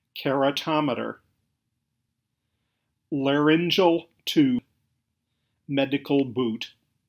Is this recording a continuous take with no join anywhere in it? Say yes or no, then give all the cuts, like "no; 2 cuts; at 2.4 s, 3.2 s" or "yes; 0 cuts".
no; 2 cuts; at 1.8 s, 4.6 s